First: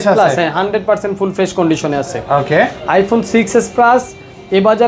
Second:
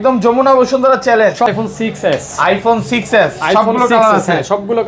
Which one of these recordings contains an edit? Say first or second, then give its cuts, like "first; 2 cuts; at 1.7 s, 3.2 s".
second; 1 cut; at 1.5 s